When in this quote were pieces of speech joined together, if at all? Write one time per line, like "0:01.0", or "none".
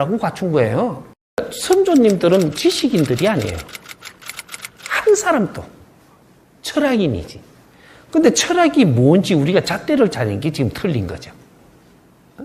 0:01.5